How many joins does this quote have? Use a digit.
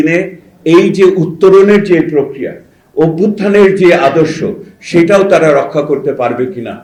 0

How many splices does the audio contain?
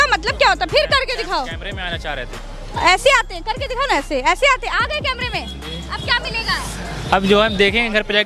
0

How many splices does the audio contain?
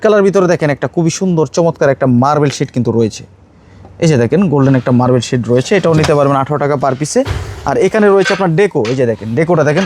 0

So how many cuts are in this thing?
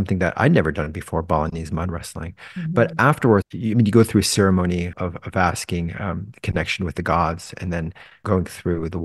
3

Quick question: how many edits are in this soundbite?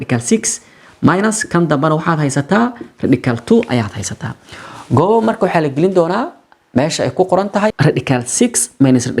1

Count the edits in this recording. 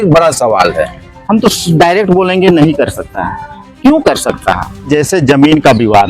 1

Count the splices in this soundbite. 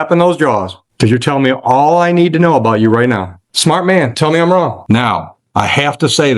2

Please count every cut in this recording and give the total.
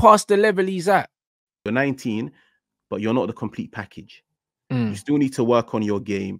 1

